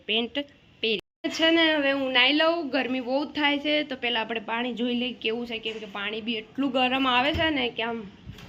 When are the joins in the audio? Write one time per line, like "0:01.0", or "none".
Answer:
none

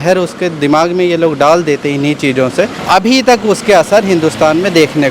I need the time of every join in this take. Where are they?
0:02.8

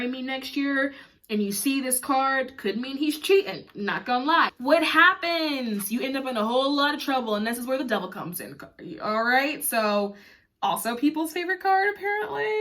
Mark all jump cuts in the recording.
0:04.6

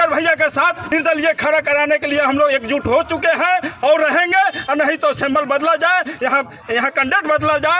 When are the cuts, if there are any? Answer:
0:00.9

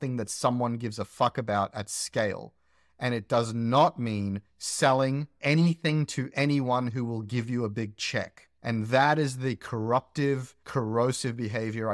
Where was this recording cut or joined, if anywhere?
none

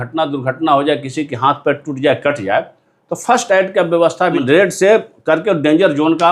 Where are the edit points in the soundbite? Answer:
0:04.4

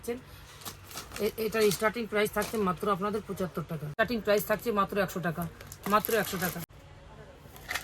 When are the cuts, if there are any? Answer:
0:03.9
0:06.7

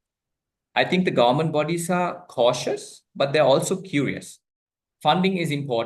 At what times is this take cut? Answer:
0:04.5

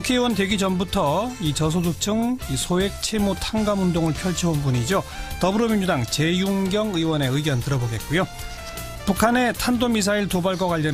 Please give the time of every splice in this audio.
none

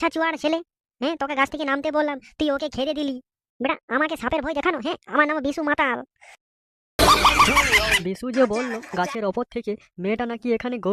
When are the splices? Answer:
0:07.9

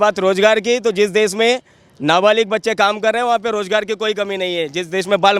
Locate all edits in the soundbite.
none

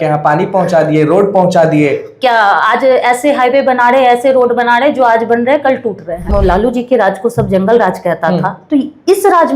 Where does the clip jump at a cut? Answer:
0:06.3

